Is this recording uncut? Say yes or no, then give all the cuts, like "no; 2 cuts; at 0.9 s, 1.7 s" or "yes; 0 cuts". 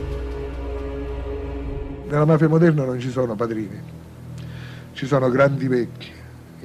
yes; 0 cuts